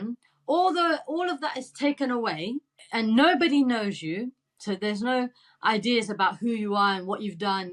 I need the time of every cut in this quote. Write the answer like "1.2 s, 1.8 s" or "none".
2.8 s